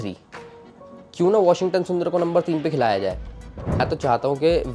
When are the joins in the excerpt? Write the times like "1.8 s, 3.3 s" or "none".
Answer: 3.8 s